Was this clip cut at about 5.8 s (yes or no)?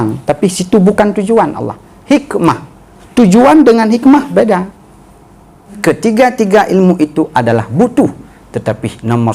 yes